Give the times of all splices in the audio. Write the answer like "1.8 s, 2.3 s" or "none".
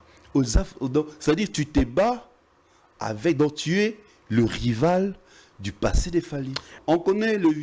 6.7 s